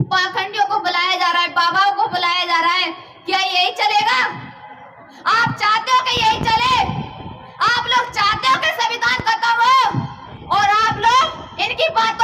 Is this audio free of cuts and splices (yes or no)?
no